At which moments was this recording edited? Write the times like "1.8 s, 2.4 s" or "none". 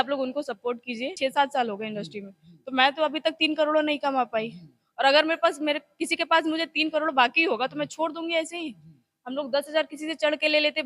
1.1 s